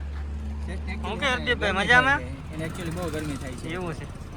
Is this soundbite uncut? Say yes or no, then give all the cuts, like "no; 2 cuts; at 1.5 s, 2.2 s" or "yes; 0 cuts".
yes; 0 cuts